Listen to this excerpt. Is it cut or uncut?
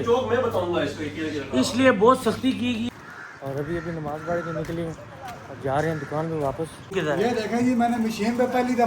cut